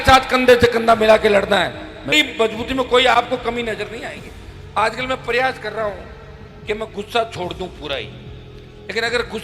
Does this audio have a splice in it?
yes; 1 cut; at 2.1 s

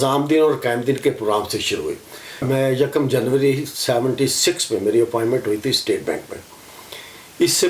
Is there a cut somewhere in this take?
yes; 1 cut; at 2.4 s

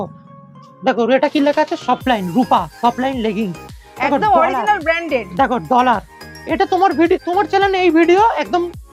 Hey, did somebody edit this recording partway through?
no; 0 cuts

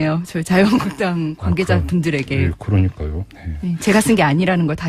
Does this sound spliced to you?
no; 0 cuts

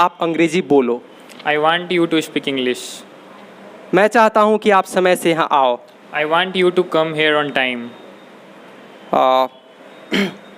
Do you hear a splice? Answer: no; 0 cuts

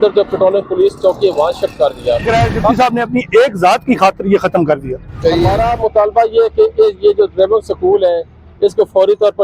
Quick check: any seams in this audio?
yes; 2 cuts; at 2.2 s, 5.2 s

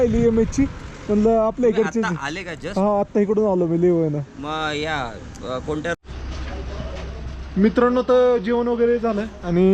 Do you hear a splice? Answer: yes; 1 cut; at 6.0 s

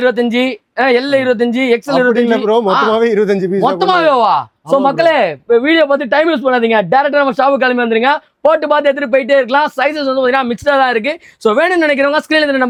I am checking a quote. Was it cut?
no; 0 cuts

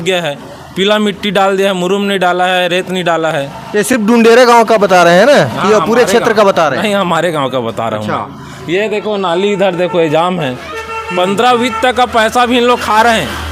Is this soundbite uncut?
yes; 0 cuts

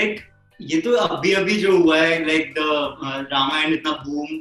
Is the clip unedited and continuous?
yes; 0 cuts

